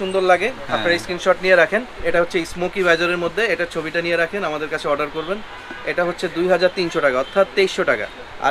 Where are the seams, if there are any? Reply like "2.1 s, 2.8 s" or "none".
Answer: 2.0 s